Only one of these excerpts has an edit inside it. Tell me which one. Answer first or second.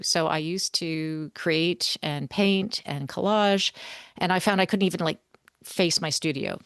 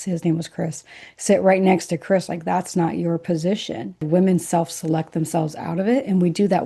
second